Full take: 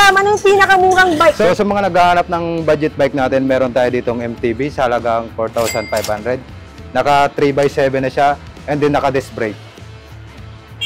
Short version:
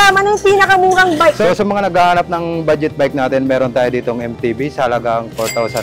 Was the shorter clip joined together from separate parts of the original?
no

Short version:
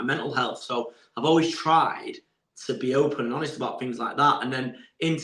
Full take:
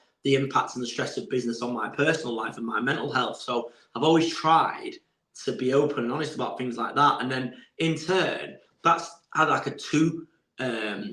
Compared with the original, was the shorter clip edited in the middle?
no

